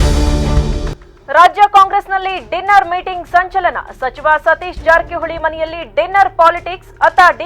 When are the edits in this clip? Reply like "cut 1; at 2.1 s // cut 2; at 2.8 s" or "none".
cut 1; at 1.0 s